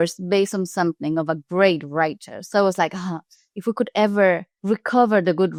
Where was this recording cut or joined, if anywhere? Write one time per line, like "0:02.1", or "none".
none